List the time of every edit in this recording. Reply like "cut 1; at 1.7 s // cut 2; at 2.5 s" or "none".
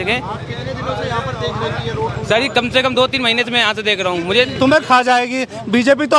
cut 1; at 4.5 s